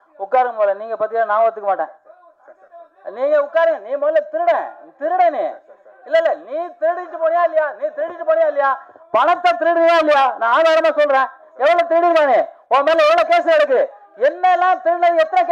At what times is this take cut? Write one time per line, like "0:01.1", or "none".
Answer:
none